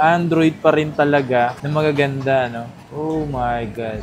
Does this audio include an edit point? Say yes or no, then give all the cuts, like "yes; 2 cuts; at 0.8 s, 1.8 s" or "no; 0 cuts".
no; 0 cuts